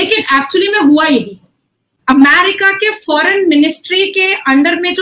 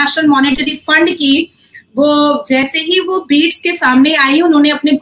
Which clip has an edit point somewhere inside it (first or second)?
first